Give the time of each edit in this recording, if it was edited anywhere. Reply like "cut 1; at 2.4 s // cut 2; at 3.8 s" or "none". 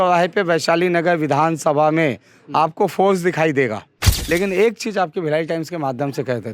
cut 1; at 4.1 s

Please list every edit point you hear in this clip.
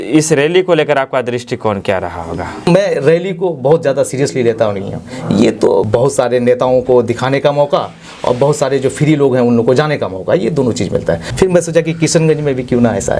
cut 1; at 2.6 s // cut 2; at 5.9 s // cut 3; at 11.3 s

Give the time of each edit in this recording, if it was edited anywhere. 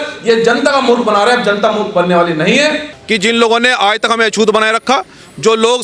cut 1; at 2.9 s

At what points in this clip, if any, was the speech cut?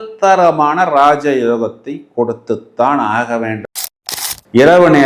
cut 1; at 4.0 s

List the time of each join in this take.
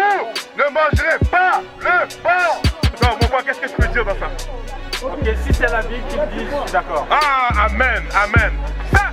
none

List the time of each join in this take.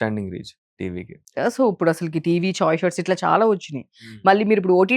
none

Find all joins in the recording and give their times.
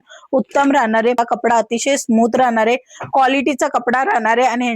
cut 1; at 1.2 s

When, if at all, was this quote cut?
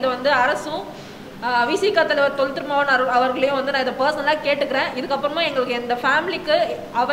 none

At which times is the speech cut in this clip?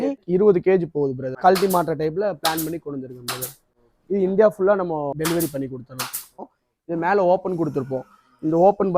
cut 1; at 1.3 s // cut 2; at 5.1 s // cut 3; at 6.4 s

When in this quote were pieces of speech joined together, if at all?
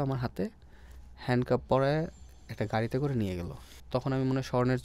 cut 1; at 3.7 s

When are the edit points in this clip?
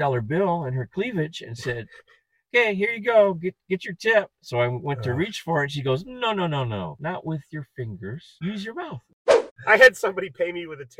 cut 1; at 1.3 s // cut 2; at 7.0 s // cut 3; at 8.3 s // cut 4; at 9.4 s

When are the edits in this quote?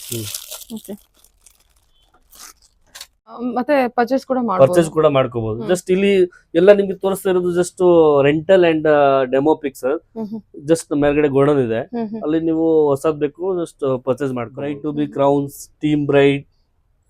cut 1; at 3.3 s // cut 2; at 14.8 s

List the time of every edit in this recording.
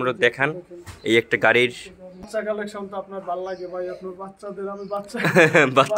cut 1; at 2.3 s

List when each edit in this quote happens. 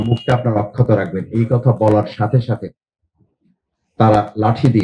none

